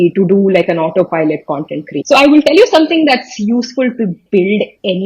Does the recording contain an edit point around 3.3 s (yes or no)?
no